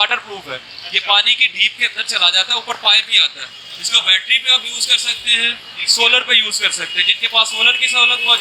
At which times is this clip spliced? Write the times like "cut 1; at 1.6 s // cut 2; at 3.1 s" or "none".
none